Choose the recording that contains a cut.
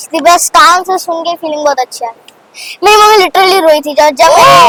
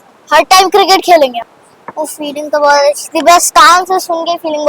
second; 1 cut; at 1.5 s

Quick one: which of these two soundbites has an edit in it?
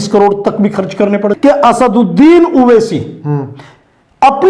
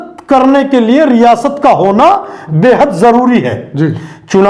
first; 1 cut; at 1.3 s

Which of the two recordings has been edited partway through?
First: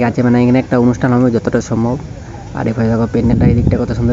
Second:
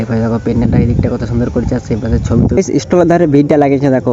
second; 1 cut; at 2.6 s

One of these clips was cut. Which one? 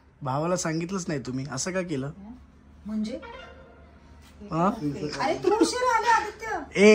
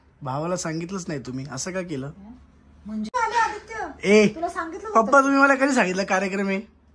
second; 1 cut; at 3.1 s

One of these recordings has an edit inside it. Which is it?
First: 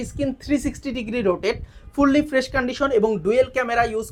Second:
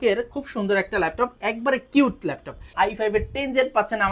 second; 1 cut; at 2.7 s

